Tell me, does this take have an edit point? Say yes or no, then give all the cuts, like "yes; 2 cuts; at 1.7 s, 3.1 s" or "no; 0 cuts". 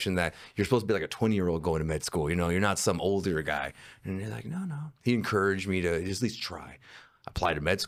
no; 0 cuts